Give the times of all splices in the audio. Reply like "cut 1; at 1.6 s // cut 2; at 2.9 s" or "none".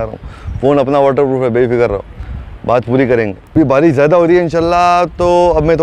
cut 1; at 3.6 s